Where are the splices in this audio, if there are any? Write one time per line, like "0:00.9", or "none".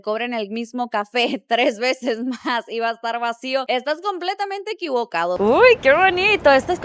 0:05.4